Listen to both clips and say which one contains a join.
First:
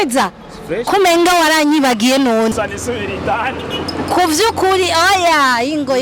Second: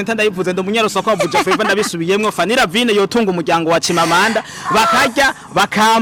first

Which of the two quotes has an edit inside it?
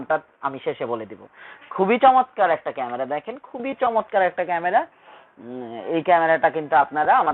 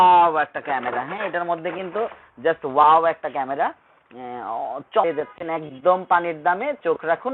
second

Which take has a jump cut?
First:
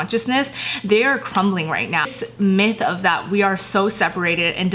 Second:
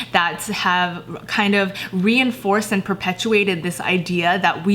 first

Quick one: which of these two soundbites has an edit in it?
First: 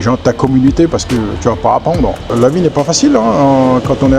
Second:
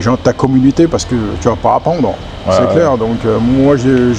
first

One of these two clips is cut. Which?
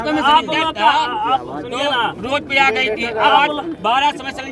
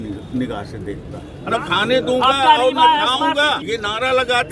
second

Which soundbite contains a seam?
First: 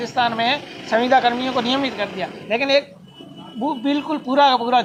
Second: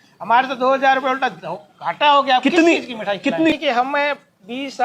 second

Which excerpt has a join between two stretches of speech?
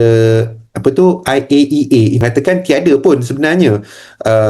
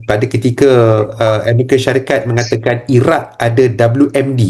first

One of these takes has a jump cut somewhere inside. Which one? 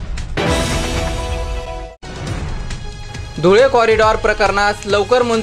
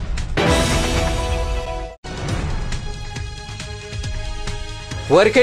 first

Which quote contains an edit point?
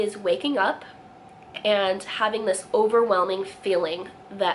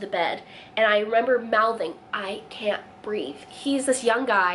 second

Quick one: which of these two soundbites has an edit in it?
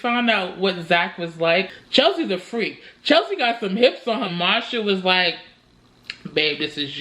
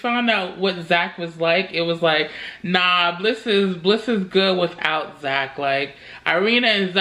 first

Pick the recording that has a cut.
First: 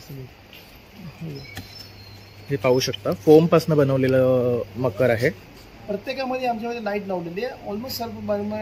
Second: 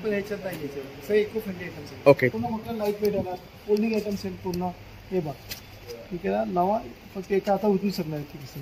second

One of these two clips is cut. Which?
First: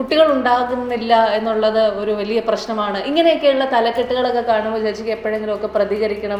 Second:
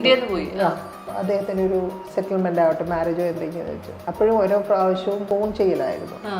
second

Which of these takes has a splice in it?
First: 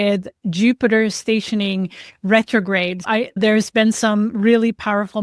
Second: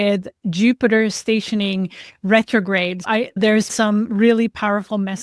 second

